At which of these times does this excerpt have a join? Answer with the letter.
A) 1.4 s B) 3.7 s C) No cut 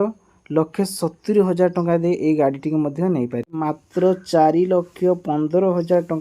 B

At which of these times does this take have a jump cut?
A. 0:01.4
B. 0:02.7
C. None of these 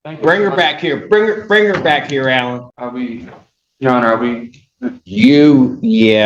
B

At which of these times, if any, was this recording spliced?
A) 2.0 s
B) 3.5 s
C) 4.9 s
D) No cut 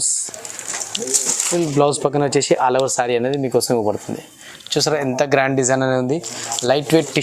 D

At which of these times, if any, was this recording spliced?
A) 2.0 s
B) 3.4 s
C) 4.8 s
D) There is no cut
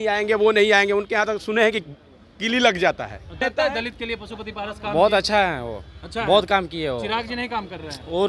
B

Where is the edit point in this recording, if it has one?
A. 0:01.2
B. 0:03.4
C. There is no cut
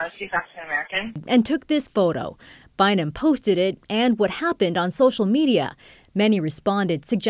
A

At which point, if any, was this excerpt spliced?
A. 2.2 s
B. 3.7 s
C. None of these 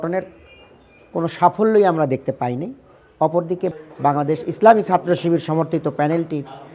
B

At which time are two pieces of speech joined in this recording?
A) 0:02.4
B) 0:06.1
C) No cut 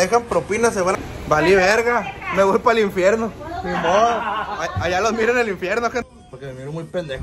B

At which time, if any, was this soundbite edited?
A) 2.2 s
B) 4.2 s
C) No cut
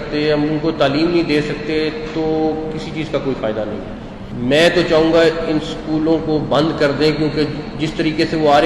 B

